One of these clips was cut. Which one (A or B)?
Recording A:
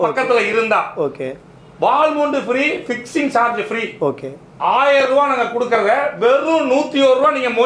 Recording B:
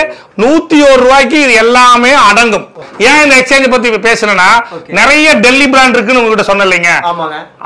B